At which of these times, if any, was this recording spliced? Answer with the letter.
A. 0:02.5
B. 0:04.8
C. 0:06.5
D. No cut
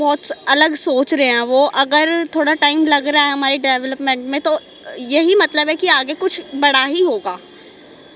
D